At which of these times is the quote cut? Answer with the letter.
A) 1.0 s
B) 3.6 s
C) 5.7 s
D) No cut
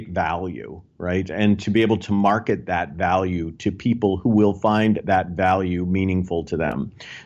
D